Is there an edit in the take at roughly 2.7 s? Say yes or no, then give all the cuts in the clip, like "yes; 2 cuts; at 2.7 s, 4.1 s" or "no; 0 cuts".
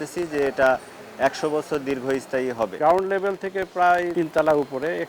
yes; 2 cuts; at 2.7 s, 4.1 s